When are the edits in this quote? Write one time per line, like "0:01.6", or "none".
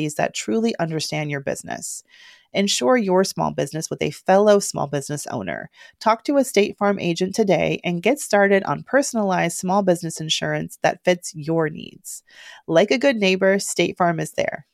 none